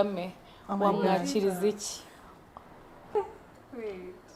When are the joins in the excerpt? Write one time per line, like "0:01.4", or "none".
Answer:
0:03.1